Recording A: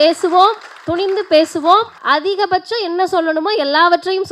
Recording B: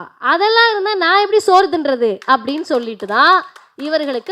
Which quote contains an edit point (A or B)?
A